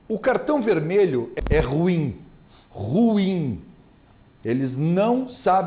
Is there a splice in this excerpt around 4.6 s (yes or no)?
no